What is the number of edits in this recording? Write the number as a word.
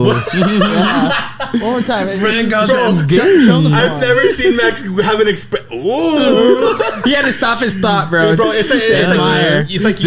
zero